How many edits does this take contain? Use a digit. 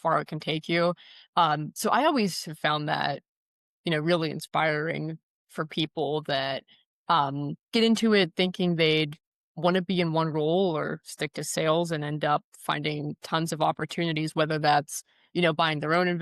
0